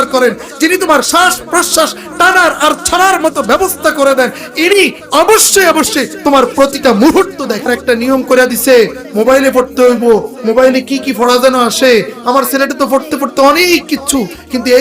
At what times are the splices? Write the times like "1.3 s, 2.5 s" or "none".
7.7 s